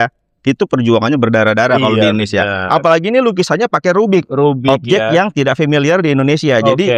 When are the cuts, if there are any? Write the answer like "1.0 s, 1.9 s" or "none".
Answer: none